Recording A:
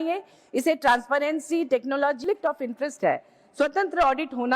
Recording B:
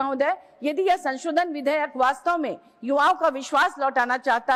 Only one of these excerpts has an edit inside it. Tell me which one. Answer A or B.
A